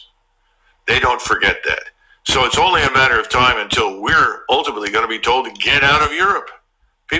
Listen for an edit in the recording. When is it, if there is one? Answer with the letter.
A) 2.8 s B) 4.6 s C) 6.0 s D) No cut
A